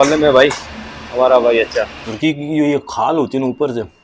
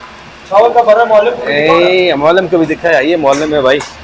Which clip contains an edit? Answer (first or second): first